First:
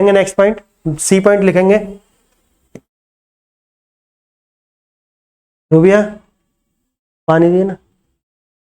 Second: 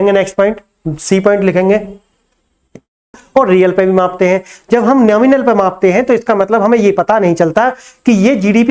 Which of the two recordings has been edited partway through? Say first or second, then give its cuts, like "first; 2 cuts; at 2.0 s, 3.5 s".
second; 1 cut; at 3.2 s